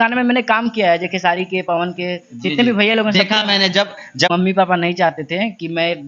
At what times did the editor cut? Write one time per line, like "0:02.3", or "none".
0:04.3